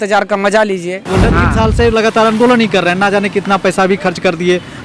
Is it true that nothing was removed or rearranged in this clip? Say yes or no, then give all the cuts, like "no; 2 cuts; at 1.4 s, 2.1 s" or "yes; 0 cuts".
no; 1 cut; at 1.1 s